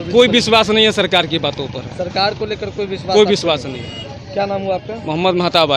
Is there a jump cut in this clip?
no; 0 cuts

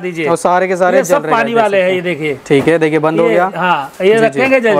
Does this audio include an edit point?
no; 0 cuts

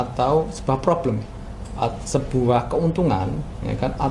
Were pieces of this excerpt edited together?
no; 0 cuts

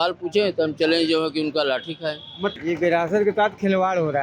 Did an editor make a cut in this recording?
yes; 1 cut; at 2.6 s

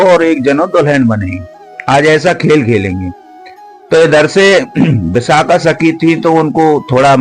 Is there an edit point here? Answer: no; 0 cuts

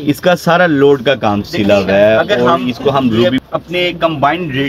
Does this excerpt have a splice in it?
yes; 1 cut; at 3.2 s

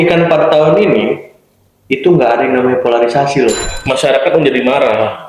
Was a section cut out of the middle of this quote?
yes; 1 cut; at 3.6 s

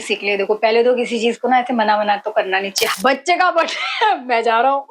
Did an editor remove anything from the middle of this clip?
yes; 1 cut; at 2.9 s

